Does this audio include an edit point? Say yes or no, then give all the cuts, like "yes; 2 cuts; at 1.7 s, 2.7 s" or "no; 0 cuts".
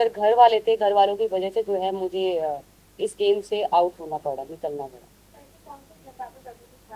no; 0 cuts